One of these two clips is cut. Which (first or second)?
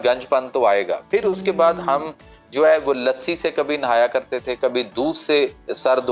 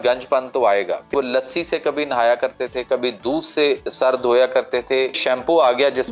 second